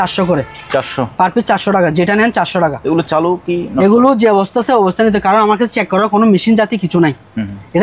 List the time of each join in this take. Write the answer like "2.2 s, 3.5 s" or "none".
none